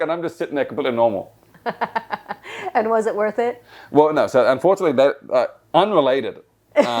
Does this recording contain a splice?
no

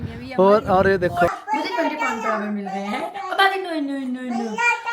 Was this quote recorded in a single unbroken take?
no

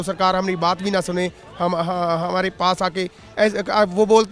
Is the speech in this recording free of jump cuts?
yes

